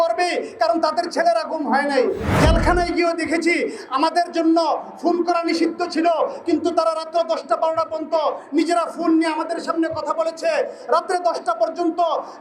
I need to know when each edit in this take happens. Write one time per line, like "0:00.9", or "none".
0:02.3